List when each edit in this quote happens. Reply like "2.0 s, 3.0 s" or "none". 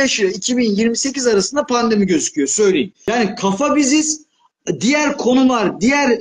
3.0 s